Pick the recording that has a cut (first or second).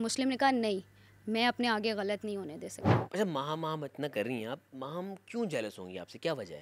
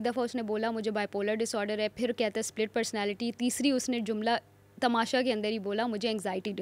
first